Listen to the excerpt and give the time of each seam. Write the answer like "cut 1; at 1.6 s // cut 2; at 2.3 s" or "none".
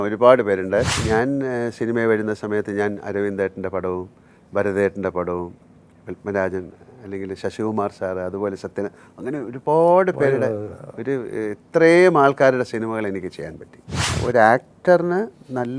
cut 1; at 1.0 s // cut 2; at 14.1 s